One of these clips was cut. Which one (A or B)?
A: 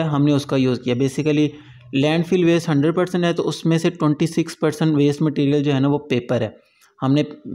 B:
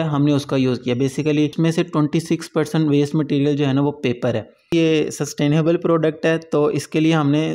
B